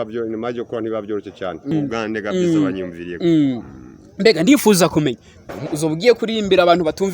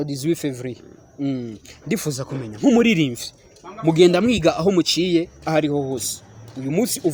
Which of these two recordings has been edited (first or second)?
first